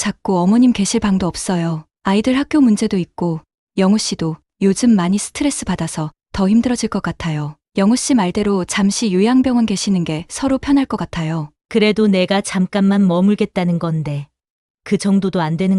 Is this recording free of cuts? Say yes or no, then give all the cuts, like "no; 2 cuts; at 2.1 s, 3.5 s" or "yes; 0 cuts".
no; 1 cut; at 11.5 s